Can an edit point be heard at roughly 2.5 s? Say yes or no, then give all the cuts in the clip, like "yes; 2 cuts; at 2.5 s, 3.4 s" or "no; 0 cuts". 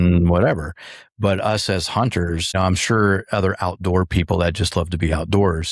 yes; 1 cut; at 2.5 s